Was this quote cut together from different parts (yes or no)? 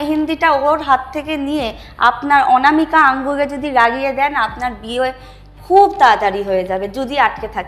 no